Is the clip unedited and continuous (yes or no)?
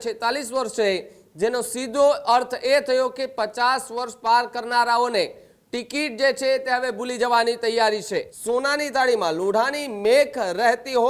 no